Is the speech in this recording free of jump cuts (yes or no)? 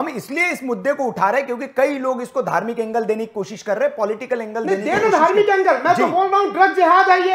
yes